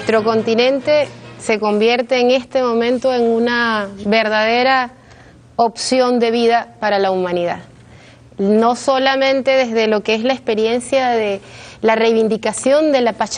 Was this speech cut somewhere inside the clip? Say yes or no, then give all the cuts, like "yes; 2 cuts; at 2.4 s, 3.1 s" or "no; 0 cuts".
no; 0 cuts